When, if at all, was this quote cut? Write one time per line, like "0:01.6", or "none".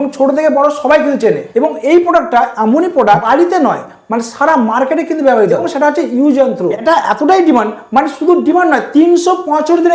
0:01.4
0:03.3
0:05.7
0:06.8